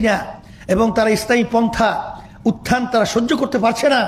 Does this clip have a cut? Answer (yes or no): no